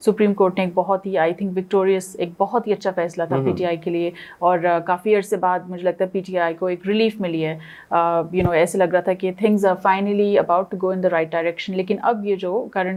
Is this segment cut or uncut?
uncut